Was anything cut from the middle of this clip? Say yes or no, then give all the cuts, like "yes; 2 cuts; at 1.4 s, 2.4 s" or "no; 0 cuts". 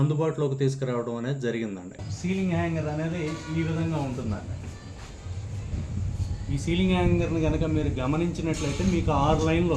yes; 1 cut; at 2.0 s